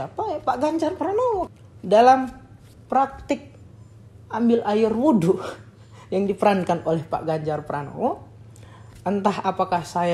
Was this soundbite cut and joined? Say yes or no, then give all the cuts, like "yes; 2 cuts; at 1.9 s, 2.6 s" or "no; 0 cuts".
yes; 1 cut; at 1.5 s